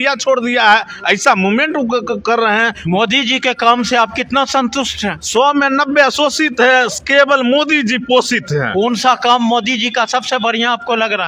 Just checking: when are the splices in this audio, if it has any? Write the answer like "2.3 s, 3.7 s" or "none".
none

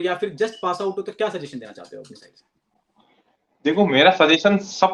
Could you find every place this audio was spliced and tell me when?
none

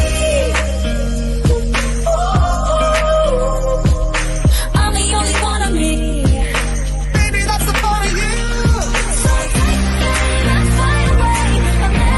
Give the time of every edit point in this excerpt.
none

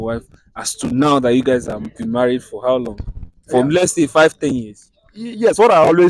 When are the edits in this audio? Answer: none

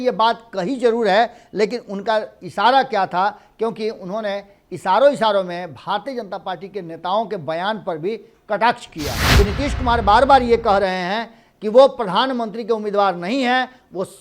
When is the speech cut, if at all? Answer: 9.2 s

